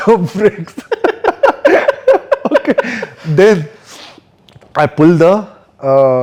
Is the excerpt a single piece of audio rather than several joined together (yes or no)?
yes